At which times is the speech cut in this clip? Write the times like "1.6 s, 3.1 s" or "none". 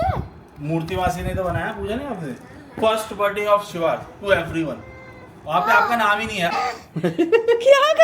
6.5 s